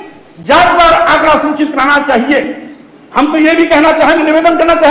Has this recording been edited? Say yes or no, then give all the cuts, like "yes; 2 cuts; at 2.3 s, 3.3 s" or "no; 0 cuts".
no; 0 cuts